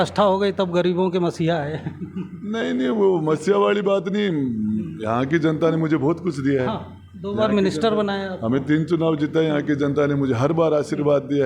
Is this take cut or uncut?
uncut